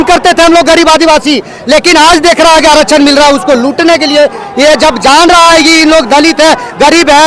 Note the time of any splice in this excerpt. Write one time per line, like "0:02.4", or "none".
none